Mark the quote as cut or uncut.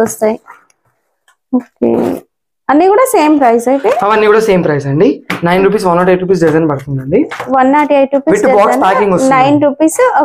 uncut